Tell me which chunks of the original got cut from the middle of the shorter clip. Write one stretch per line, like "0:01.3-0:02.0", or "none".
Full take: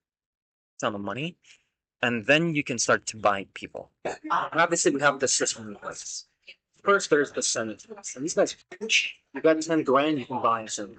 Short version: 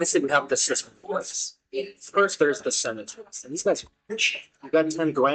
none